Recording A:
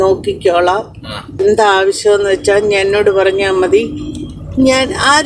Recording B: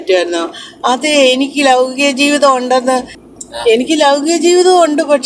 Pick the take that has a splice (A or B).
B